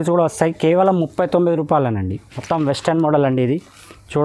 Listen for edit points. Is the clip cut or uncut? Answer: cut